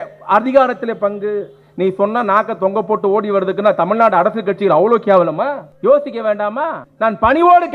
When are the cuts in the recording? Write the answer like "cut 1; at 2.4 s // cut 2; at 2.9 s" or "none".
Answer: cut 1; at 5.7 s // cut 2; at 6.8 s